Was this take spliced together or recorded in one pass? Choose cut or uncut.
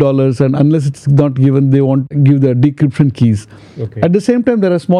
cut